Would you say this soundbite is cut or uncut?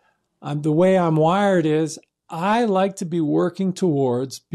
uncut